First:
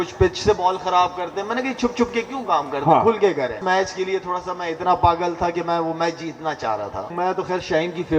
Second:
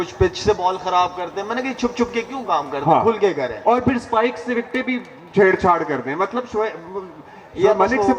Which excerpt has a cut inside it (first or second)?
first